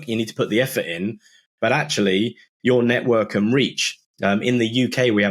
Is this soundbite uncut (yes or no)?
yes